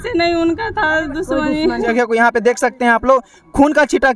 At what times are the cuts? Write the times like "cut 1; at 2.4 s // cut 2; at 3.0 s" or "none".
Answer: cut 1; at 1.9 s